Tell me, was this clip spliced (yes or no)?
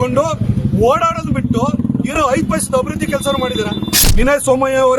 yes